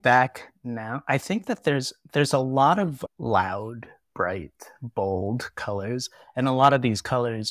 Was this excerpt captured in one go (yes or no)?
no